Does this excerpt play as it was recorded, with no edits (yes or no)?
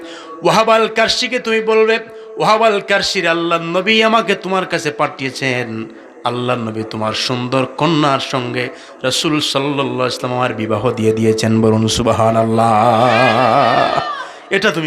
yes